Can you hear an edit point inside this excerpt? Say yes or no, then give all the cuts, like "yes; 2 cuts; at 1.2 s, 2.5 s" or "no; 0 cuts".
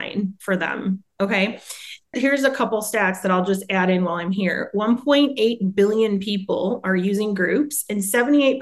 no; 0 cuts